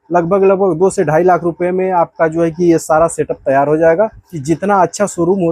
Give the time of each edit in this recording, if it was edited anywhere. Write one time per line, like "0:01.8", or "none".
0:04.3